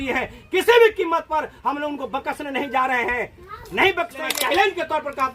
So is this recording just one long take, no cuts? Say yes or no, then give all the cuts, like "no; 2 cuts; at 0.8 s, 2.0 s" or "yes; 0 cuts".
no; 1 cut; at 4.2 s